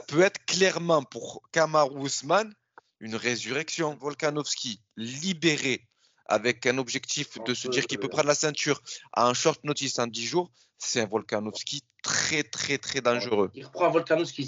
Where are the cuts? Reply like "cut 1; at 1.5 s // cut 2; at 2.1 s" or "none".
cut 1; at 4.0 s // cut 2; at 13.6 s